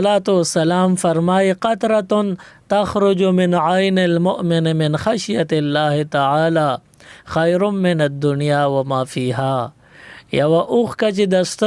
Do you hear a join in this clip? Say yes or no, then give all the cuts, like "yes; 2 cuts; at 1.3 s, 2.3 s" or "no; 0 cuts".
no; 0 cuts